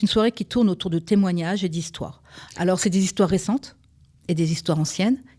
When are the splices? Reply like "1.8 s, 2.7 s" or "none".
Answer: none